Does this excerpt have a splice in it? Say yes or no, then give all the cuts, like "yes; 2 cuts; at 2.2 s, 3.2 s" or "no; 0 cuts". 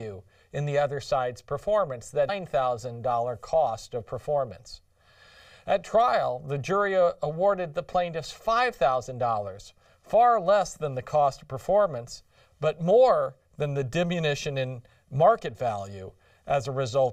no; 0 cuts